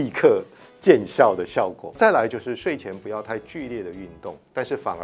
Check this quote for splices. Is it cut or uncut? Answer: cut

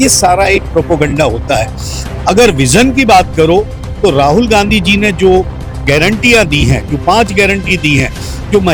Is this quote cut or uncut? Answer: uncut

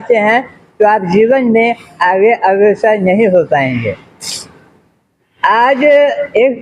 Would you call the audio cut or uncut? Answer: uncut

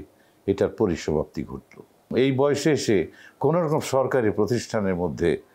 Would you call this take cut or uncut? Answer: cut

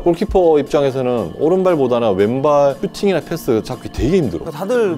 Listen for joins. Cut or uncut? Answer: uncut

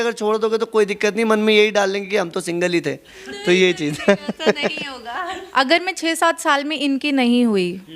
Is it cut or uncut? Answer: cut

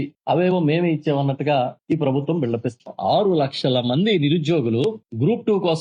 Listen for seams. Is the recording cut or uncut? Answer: uncut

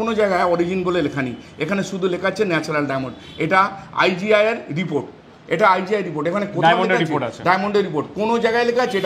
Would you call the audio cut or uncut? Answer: uncut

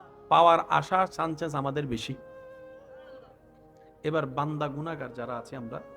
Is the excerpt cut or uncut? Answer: cut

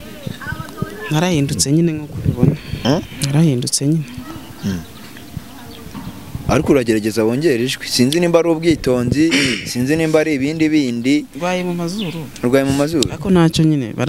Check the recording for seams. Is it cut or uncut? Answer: uncut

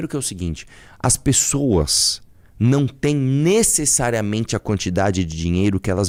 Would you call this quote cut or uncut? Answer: uncut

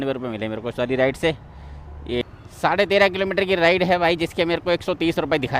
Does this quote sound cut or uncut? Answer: cut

